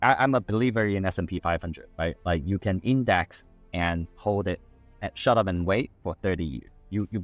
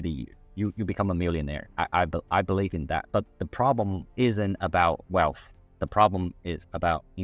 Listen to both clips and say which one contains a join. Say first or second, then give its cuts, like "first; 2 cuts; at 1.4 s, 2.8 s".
second; 2 cuts; at 3.0 s, 4.0 s